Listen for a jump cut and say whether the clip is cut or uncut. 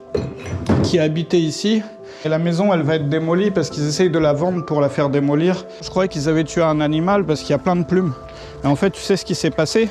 cut